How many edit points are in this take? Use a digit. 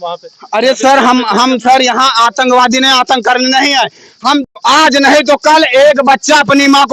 1